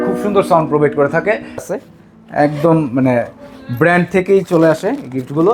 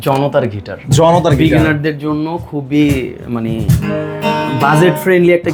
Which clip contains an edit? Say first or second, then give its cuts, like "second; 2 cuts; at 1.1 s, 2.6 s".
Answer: first; 1 cut; at 1.6 s